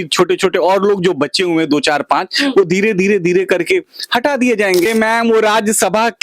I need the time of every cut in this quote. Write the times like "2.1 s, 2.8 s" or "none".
4.9 s